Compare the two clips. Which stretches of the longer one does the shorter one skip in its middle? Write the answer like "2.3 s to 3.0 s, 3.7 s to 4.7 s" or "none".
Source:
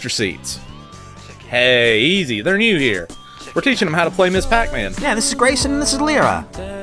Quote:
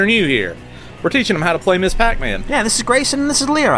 none